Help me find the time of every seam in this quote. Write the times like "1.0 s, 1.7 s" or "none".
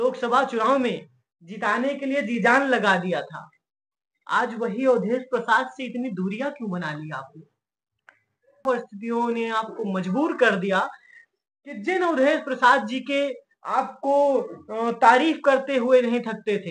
8.6 s